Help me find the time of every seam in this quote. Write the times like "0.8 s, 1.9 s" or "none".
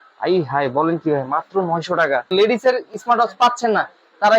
2.3 s